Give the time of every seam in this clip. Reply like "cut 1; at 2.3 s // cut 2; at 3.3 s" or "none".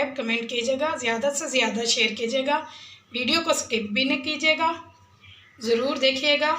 none